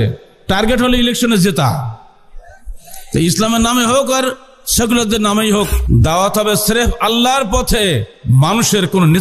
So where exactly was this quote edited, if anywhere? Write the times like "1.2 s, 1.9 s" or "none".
5.8 s